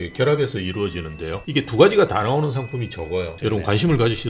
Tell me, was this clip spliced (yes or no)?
yes